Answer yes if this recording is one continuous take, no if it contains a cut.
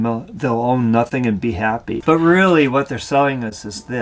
no